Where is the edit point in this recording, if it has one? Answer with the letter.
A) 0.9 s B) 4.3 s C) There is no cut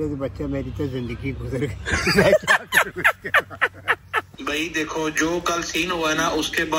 B